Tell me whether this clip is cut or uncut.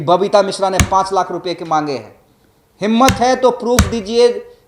uncut